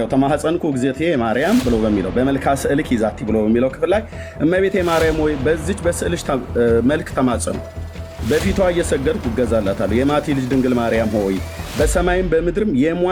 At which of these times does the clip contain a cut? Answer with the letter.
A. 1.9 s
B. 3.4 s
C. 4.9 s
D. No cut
D